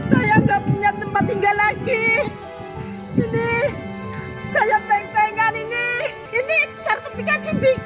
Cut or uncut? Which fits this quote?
cut